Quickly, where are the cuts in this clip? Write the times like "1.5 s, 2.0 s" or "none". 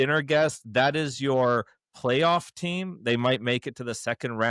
none